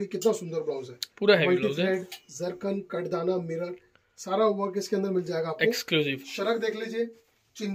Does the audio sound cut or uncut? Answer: uncut